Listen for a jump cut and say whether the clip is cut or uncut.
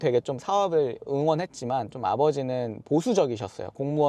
uncut